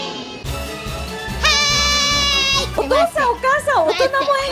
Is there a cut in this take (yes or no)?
yes